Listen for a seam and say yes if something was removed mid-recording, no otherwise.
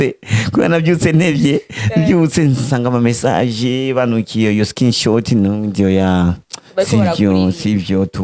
no